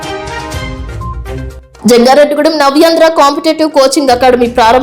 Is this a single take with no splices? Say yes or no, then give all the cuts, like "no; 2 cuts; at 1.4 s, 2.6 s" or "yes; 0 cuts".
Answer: no; 1 cut; at 1.2 s